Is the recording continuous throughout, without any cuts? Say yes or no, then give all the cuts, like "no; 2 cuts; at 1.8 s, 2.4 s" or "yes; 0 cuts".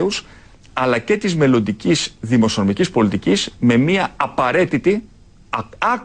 yes; 0 cuts